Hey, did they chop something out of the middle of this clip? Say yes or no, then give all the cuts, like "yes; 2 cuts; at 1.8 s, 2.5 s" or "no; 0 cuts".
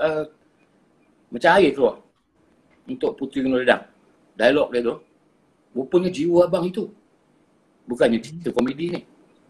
no; 0 cuts